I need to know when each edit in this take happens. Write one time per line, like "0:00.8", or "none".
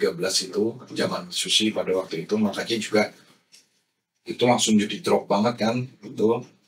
none